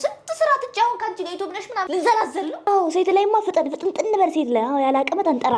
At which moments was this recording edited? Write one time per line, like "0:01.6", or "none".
0:02.7

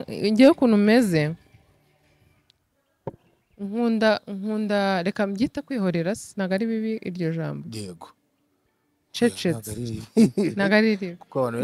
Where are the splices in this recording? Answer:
none

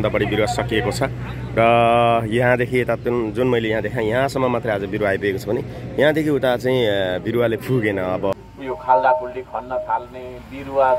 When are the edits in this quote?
0:08.3

